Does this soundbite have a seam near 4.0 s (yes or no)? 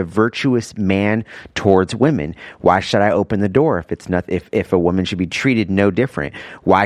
no